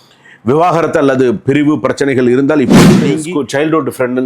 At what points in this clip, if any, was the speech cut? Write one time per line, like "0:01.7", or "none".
0:03.1